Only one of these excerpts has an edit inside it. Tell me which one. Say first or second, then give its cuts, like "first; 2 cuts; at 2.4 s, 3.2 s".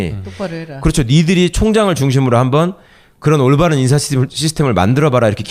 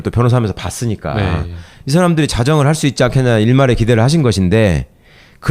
second; 1 cut; at 1.1 s